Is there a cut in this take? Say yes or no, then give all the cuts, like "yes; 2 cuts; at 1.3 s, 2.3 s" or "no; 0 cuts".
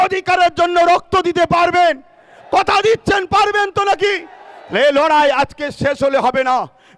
no; 0 cuts